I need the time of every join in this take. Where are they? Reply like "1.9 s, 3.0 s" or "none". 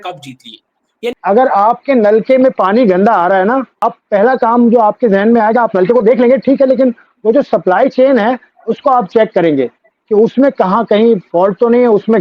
1.1 s, 3.8 s